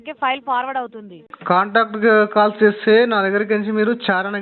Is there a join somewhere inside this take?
yes; 1 cut; at 1.3 s

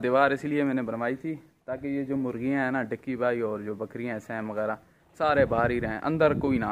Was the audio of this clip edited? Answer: no; 0 cuts

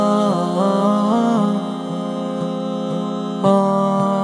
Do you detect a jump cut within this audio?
no; 0 cuts

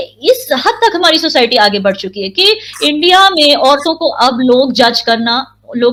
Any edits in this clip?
no; 0 cuts

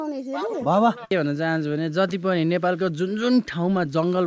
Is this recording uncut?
no; 1 cut; at 1.0 s

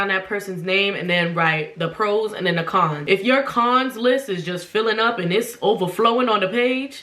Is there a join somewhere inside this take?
yes; 1 cut; at 3.0 s

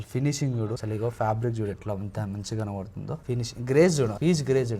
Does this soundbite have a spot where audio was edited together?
yes; 2 cuts; at 0.8 s, 3.2 s

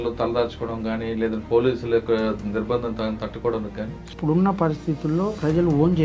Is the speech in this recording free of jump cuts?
no; 1 cut; at 4.1 s

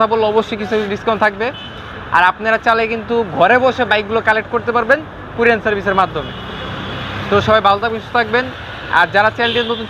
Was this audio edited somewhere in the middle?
no; 0 cuts

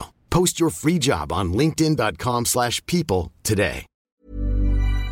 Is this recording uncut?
no; 1 cut; at 3.9 s

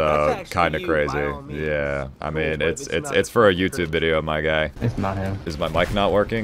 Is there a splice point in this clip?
no; 0 cuts

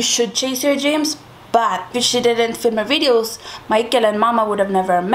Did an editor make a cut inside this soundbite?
yes; 1 cut; at 1.9 s

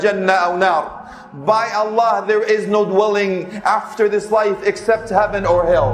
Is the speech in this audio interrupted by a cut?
no; 0 cuts

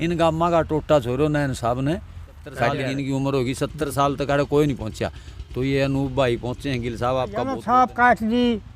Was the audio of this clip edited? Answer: yes; 2 cuts; at 2.8 s, 7.6 s

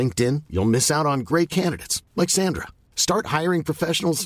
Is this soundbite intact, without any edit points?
yes; 0 cuts

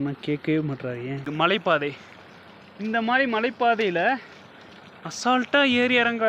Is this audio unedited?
no; 1 cut; at 1.5 s

